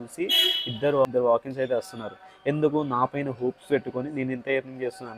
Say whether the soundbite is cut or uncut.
cut